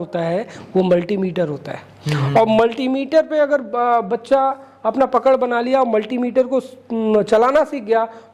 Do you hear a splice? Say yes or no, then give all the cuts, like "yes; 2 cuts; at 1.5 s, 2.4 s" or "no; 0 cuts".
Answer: no; 0 cuts